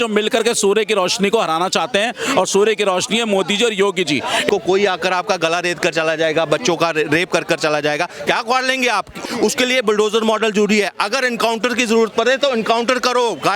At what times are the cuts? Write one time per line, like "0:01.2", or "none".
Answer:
0:04.5
0:09.2